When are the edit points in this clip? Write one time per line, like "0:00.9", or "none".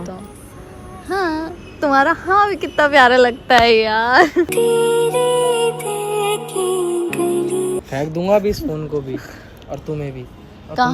0:07.9